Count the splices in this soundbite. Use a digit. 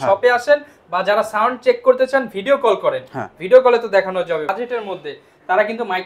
1